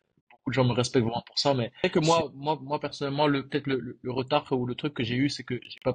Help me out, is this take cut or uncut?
cut